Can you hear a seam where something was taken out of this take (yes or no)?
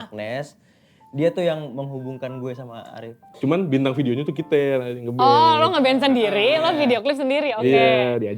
yes